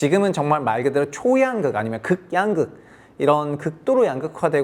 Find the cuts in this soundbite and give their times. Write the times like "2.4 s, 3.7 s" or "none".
none